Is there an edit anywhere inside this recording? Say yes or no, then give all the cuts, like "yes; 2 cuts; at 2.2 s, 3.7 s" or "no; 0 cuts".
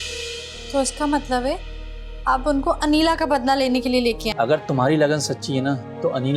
yes; 1 cut; at 4.3 s